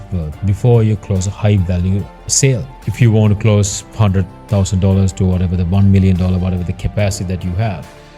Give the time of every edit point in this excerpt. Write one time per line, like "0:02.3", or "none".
none